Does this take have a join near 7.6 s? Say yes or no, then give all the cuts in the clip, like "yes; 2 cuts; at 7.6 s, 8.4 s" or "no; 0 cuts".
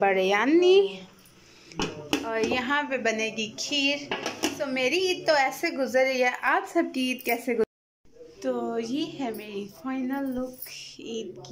yes; 1 cut; at 7.6 s